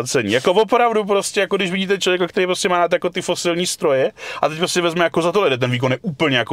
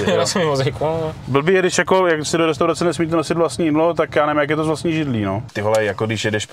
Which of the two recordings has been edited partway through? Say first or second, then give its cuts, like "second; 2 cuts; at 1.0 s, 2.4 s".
second; 1 cut; at 5.5 s